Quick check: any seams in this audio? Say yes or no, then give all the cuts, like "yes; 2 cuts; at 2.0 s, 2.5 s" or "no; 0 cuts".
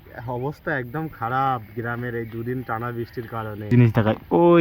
yes; 1 cut; at 3.7 s